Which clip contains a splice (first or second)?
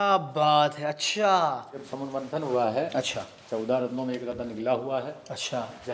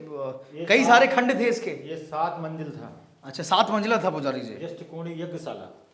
first